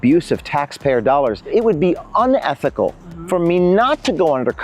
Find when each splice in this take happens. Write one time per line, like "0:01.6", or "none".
0:01.5